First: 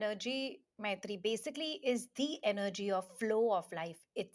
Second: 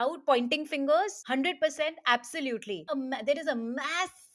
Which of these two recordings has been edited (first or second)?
second